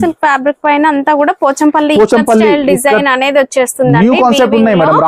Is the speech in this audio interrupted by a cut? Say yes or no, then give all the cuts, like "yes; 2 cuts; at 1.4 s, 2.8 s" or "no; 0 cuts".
no; 0 cuts